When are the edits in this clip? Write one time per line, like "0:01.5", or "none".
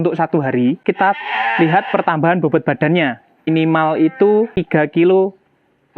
0:00.8
0:03.5
0:04.5